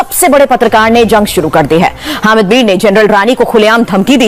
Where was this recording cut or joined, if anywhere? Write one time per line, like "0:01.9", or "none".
none